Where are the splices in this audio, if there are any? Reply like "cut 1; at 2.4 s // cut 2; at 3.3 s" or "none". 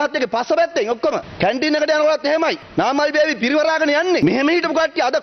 cut 1; at 1.3 s // cut 2; at 2.6 s // cut 3; at 4.2 s